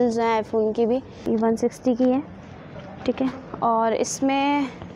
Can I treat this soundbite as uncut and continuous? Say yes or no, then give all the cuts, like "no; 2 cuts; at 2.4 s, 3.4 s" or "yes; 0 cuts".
no; 1 cut; at 1.2 s